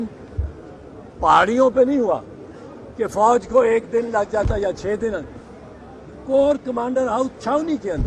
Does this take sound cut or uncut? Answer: uncut